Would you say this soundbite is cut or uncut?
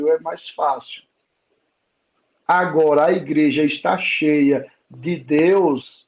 uncut